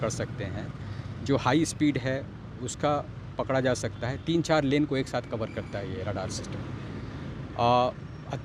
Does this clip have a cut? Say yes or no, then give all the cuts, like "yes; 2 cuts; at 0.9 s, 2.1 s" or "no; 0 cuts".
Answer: no; 0 cuts